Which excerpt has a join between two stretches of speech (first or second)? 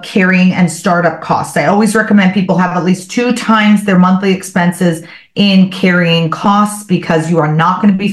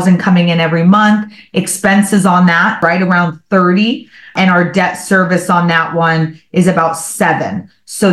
second